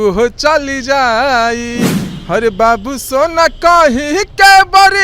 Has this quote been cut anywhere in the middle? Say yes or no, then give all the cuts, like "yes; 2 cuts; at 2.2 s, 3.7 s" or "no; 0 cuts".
yes; 1 cut; at 2.0 s